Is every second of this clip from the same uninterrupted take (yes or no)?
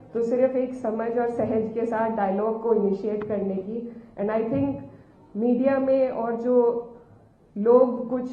yes